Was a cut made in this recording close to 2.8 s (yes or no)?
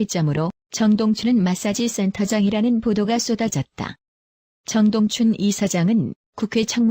yes